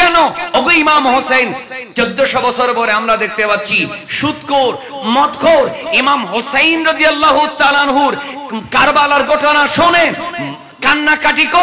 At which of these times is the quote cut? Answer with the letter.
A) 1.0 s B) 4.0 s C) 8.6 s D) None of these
D